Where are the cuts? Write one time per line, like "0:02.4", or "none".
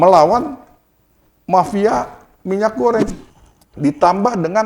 0:03.1